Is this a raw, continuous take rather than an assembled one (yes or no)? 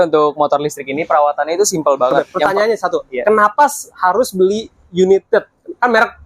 no